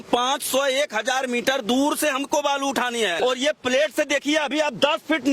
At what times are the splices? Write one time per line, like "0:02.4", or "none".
0:03.2